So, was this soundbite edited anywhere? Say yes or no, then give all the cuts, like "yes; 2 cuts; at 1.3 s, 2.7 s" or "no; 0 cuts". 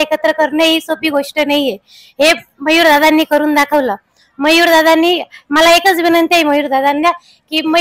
no; 0 cuts